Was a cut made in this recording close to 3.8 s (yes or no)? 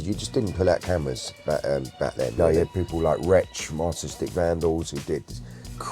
no